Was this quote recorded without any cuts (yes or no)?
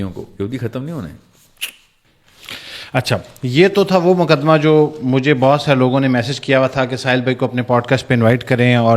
yes